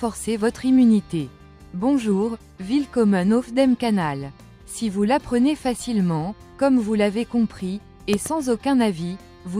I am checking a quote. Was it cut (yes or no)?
yes